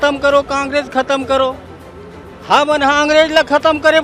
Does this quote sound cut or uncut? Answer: uncut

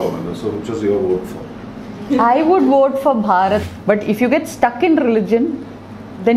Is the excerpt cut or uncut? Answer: cut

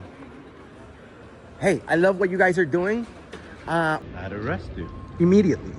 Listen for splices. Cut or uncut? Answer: cut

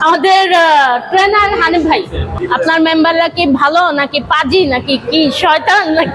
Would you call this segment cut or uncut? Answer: cut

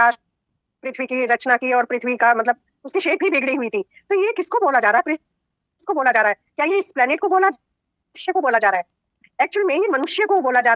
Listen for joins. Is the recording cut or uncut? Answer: uncut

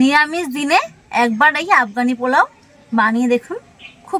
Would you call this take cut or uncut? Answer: uncut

